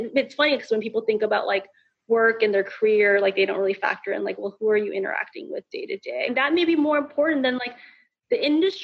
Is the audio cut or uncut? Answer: cut